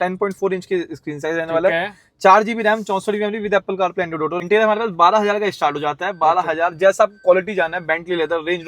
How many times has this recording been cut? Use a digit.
1